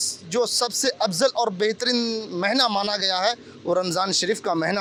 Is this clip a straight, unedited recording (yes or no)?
yes